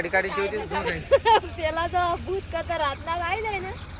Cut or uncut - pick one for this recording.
uncut